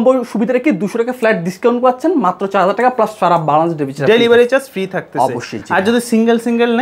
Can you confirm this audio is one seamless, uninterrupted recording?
yes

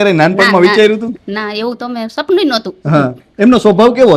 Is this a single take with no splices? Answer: yes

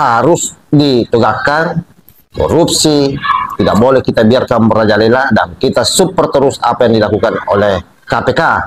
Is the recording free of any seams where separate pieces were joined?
yes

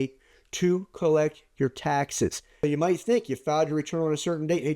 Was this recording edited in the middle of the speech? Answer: yes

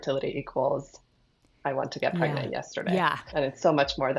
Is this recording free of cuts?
no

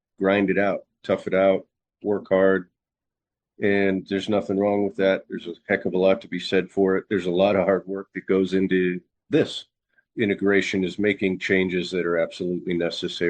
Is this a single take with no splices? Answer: no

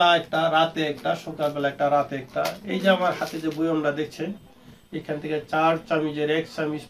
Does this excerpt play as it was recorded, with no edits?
yes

